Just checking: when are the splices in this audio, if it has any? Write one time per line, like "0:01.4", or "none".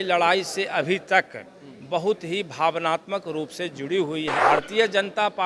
0:04.4